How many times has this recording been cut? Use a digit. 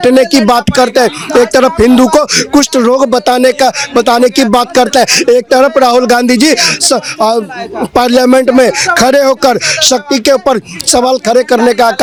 0